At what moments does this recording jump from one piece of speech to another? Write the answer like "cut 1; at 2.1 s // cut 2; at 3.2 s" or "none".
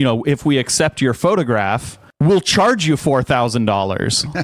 none